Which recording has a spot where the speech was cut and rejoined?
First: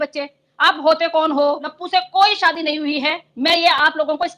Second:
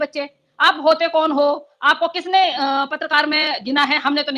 first; 1 cut; at 1.7 s

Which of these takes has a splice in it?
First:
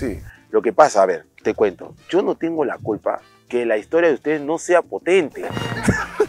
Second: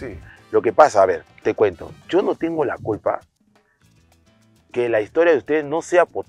first; 1 cut; at 3.3 s

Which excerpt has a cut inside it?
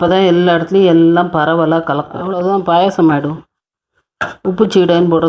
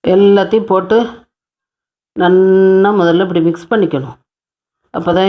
first; 1 cut; at 2.2 s

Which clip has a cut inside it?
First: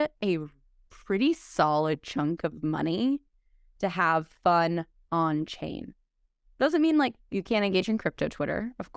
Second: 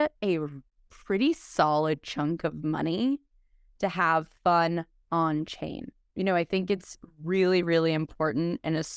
second; 1 cut; at 6.0 s

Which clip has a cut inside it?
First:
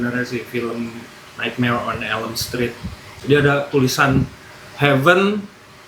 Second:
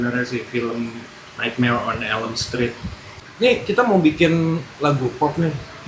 second; 1 cut; at 3.1 s

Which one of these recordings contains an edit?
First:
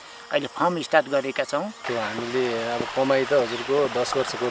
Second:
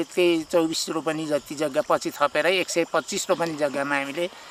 first; 1 cut; at 1.9 s

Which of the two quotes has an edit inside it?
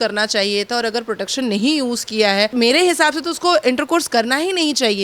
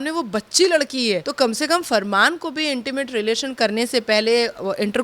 second; 1 cut; at 1.3 s

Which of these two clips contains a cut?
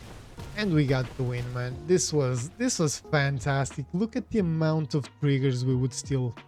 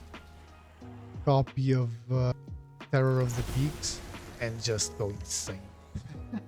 second; 1 cut; at 2.3 s

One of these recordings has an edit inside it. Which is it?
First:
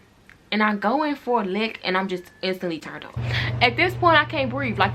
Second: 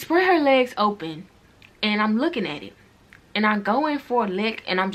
first; 1 cut; at 3.2 s

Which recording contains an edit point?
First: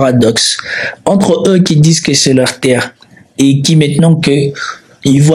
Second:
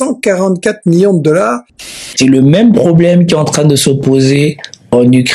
second; 1 cut; at 1.8 s

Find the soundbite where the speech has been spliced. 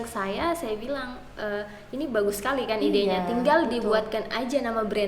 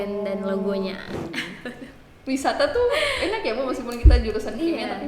second; 1 cut; at 1.2 s

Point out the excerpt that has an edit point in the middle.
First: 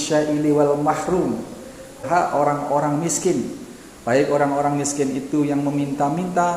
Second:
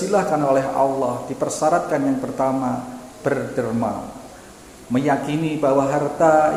first; 1 cut; at 2.0 s

